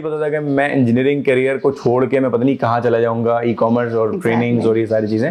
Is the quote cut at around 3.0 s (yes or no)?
no